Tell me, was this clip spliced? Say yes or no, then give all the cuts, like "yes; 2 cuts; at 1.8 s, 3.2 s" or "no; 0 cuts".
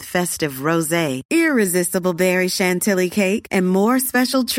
no; 0 cuts